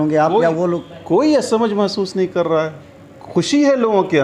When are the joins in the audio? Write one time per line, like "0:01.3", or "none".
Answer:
none